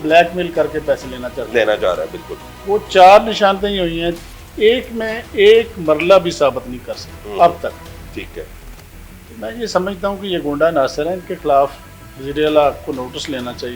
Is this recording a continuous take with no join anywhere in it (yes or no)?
yes